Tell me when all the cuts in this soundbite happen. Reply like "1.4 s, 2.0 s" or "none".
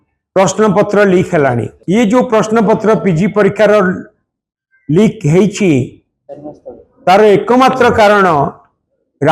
1.7 s